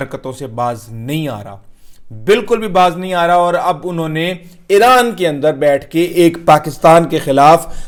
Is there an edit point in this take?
no; 0 cuts

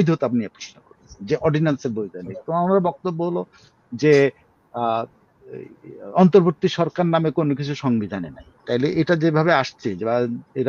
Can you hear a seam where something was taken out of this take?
no; 0 cuts

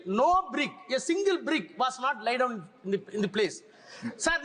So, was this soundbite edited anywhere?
no; 0 cuts

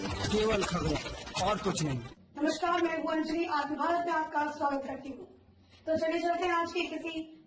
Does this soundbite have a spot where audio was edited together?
no; 0 cuts

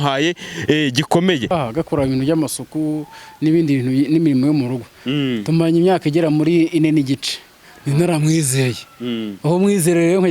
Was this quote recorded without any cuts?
no; 1 cut; at 1.5 s

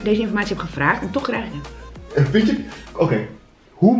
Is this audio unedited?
yes; 0 cuts

